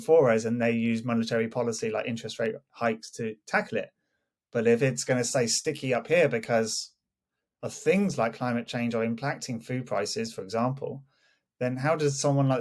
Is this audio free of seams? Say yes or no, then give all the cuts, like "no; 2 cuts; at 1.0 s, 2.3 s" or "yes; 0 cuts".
yes; 0 cuts